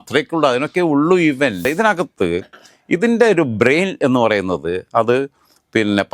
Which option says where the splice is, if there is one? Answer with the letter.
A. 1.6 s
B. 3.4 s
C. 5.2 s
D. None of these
A